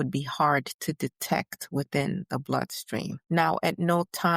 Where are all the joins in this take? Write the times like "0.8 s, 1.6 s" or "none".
3.2 s